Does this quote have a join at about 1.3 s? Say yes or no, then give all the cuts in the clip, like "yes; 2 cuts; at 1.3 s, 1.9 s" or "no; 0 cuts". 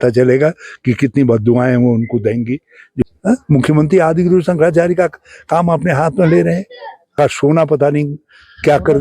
no; 2 cuts; at 3.0 s, 7.2 s